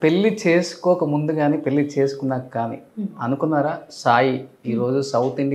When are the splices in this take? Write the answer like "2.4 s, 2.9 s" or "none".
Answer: none